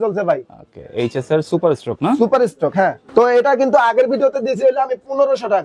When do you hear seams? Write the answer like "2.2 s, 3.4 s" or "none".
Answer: 3.0 s